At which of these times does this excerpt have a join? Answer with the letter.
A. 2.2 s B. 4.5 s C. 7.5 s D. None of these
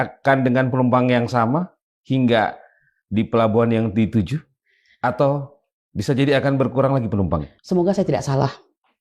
C